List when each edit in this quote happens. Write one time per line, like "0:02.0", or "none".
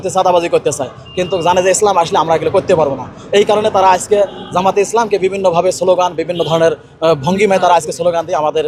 none